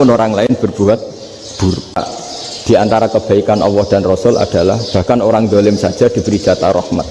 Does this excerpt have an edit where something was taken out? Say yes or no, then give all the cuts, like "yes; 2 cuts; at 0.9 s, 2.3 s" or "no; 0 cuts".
yes; 1 cut; at 2.0 s